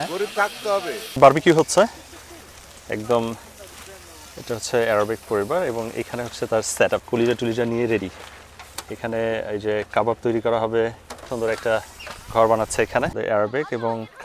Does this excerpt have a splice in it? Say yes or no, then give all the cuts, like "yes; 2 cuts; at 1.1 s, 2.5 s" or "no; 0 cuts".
yes; 4 cuts; at 1.2 s, 7.0 s, 11.2 s, 13.1 s